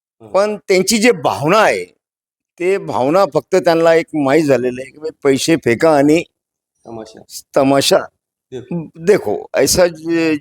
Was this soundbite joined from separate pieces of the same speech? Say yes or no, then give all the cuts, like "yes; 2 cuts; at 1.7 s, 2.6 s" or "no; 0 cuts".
no; 0 cuts